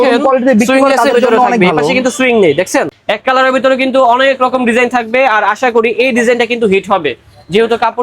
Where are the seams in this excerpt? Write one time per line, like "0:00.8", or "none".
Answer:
0:02.9